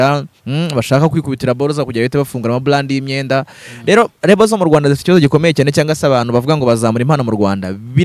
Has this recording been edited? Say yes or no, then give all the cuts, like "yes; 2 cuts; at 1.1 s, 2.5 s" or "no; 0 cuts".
no; 0 cuts